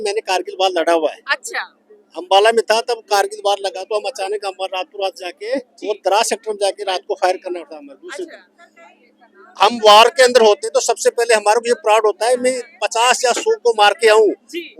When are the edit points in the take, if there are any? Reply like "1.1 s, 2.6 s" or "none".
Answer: none